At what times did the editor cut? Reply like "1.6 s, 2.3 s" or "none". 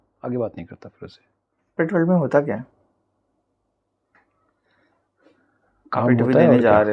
1.7 s